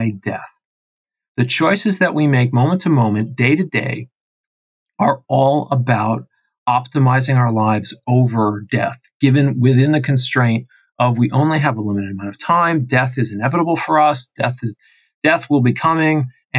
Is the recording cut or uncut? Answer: uncut